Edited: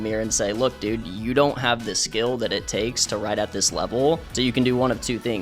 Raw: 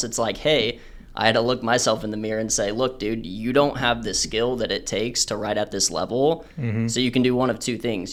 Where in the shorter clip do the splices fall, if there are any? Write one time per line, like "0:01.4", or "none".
0:04.3